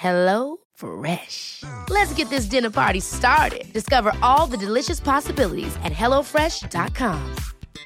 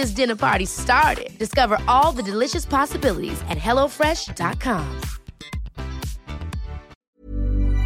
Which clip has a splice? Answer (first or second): second